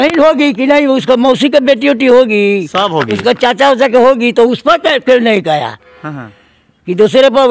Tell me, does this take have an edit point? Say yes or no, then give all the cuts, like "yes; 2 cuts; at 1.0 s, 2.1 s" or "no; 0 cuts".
no; 0 cuts